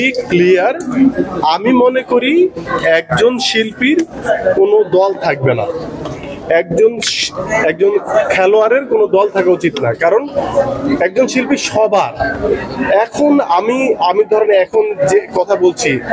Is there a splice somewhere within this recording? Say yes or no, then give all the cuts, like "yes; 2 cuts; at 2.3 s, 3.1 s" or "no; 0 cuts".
no; 0 cuts